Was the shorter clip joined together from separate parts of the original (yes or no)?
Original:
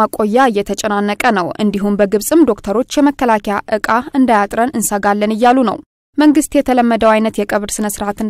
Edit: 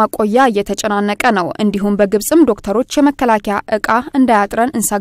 no